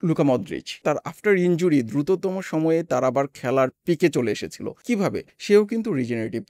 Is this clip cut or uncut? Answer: cut